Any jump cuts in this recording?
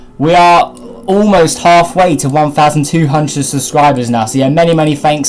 yes; 1 cut; at 3.7 s

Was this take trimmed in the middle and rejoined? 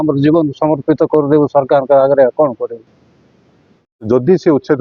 yes; 1 cut; at 3.6 s

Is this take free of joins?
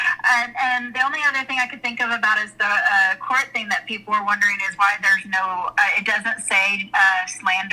yes; 0 cuts

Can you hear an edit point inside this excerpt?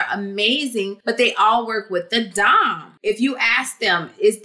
yes; 2 cuts; at 1.0 s, 3.0 s

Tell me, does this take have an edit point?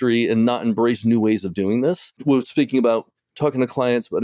yes; 1 cut; at 2.2 s

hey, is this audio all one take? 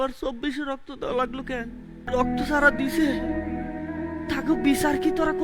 no; 1 cut; at 2.1 s

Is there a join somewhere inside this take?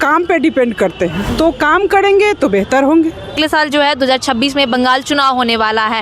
yes; 2 cuts; at 1.3 s, 3.3 s

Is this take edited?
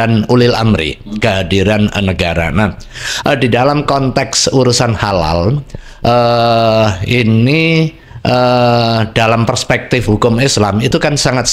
no; 0 cuts

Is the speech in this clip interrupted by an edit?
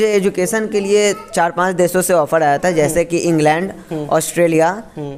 no; 0 cuts

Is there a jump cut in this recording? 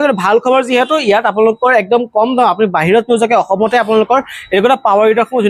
no; 0 cuts

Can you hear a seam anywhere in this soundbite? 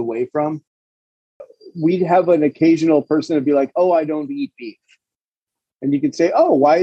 yes; 1 cut; at 1.3 s

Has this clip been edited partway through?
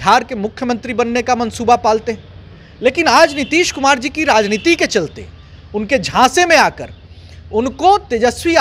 no; 0 cuts

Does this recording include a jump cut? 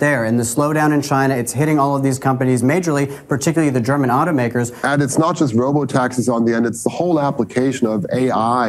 yes; 1 cut; at 4.8 s

